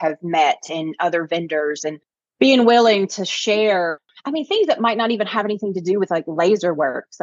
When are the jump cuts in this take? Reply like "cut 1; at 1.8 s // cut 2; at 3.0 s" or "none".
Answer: none